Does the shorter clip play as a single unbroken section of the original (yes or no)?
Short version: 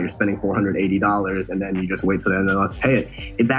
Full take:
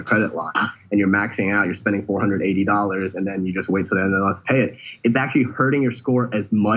yes